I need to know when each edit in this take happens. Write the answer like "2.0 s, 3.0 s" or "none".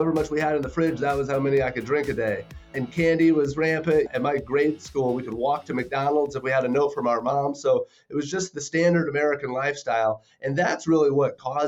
4.1 s